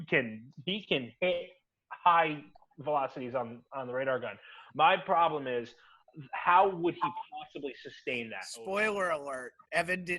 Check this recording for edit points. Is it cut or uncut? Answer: cut